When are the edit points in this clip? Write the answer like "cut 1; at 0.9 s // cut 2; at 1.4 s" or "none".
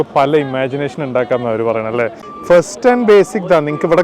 cut 1; at 2.2 s